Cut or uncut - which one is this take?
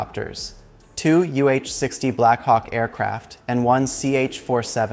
uncut